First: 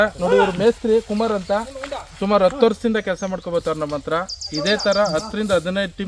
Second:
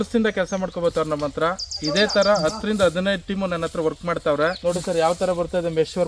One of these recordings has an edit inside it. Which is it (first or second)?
second